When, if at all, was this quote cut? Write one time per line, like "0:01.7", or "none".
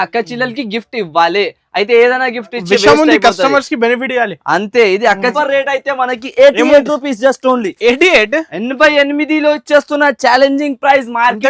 0:05.3